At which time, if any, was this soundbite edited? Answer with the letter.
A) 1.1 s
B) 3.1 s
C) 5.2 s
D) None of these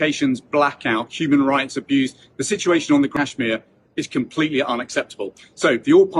B